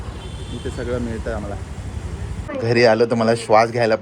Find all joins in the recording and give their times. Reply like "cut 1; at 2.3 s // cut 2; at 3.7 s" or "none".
cut 1; at 2.4 s